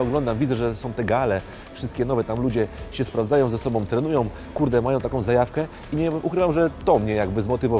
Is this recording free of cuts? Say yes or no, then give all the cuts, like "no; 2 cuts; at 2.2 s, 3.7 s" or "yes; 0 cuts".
yes; 0 cuts